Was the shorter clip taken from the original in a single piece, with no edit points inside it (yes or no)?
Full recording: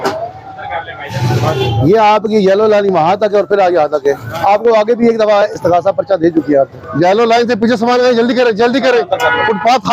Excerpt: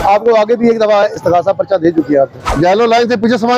yes